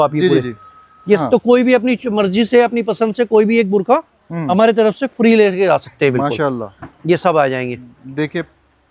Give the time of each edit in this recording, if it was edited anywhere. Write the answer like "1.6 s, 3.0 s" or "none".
1.2 s